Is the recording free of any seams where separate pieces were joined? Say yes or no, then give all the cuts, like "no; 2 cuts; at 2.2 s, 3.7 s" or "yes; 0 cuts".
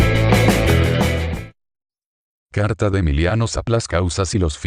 yes; 0 cuts